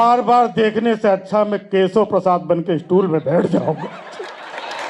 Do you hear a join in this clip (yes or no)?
no